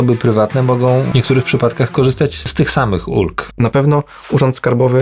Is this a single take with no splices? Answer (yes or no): no